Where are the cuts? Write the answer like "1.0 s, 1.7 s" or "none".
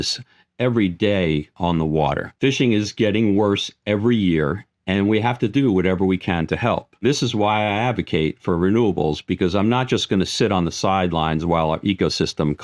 2.3 s, 7.0 s